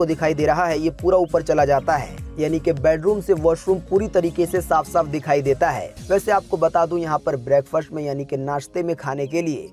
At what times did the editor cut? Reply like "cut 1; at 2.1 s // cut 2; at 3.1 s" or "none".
cut 1; at 5.9 s